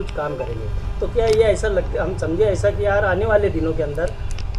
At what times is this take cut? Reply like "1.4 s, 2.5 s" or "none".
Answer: none